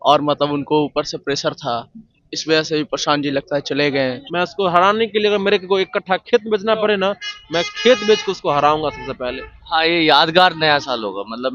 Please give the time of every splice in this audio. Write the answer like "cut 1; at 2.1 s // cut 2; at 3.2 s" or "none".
cut 1; at 4.2 s // cut 2; at 9.6 s